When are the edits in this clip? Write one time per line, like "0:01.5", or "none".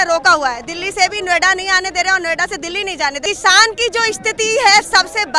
0:03.2